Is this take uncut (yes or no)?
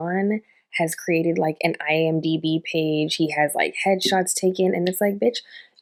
yes